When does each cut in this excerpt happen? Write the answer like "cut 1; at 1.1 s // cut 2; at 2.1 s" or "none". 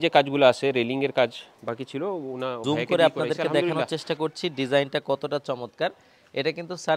cut 1; at 2.6 s